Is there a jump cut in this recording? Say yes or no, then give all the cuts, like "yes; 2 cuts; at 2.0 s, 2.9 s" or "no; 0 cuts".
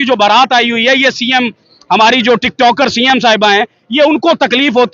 no; 0 cuts